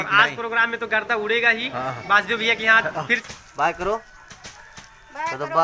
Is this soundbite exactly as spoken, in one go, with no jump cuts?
no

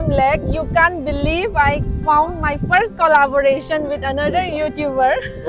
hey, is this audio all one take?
yes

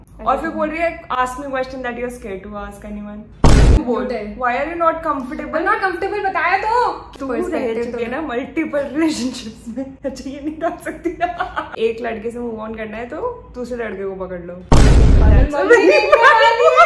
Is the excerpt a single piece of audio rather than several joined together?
no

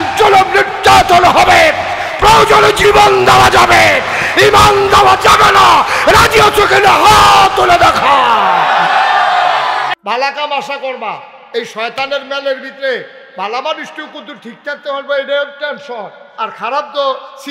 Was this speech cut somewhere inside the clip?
yes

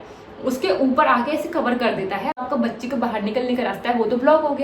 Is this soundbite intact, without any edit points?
no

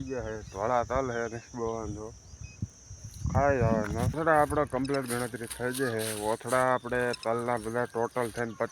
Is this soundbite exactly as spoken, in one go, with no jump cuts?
no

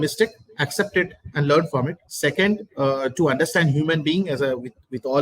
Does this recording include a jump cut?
yes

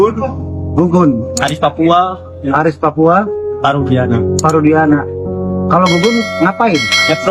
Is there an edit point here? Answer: no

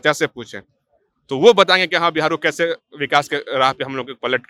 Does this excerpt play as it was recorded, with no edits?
yes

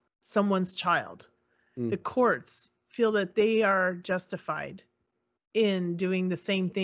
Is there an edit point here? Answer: no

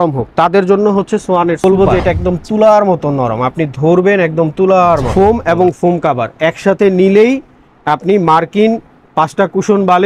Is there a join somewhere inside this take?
yes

